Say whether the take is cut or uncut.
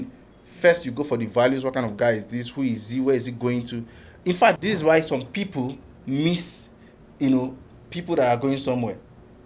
cut